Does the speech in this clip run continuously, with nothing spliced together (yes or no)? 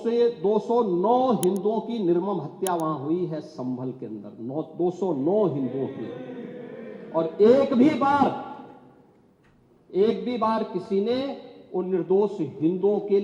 yes